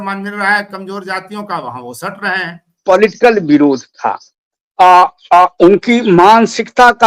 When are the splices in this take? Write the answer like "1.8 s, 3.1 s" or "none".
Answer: 2.8 s